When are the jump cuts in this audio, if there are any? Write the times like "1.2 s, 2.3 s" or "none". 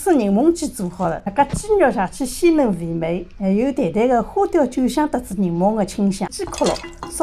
1.2 s, 6.3 s